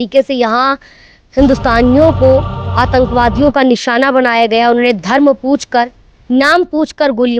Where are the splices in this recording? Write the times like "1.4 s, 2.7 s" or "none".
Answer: none